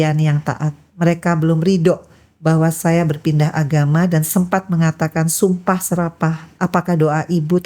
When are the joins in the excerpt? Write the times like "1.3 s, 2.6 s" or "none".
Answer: 6.5 s